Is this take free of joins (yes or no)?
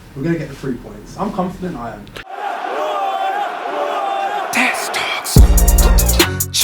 no